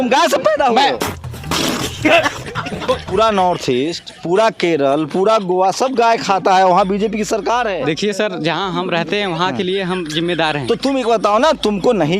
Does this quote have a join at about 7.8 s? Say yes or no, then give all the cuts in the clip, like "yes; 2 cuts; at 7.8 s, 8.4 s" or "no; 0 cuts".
yes; 3 cuts; at 1.0 s, 3.1 s, 7.8 s